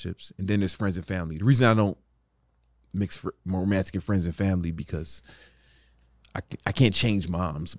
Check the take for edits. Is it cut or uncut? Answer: uncut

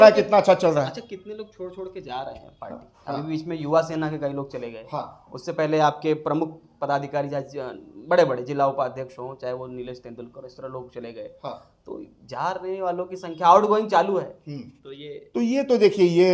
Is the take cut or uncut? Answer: uncut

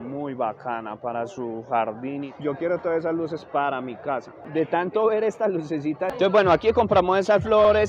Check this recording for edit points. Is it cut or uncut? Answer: cut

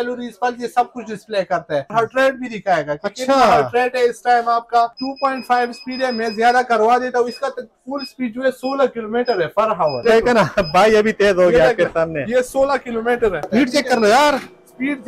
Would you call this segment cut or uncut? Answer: cut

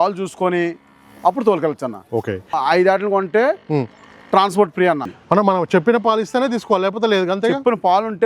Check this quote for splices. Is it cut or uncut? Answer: cut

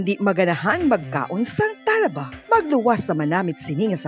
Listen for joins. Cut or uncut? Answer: uncut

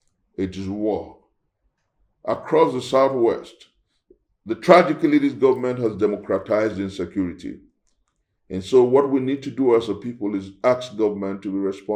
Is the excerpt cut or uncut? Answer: uncut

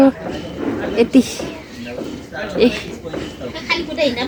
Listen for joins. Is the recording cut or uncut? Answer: uncut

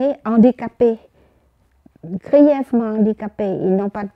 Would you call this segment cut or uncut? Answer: uncut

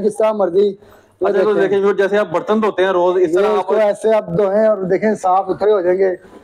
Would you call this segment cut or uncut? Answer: uncut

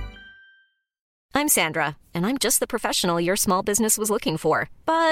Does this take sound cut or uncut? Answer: cut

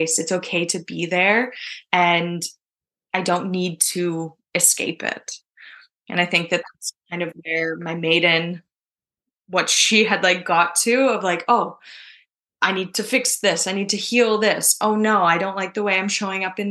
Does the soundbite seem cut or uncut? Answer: uncut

